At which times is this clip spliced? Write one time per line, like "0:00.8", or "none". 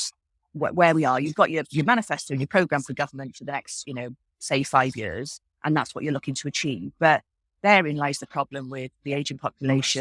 none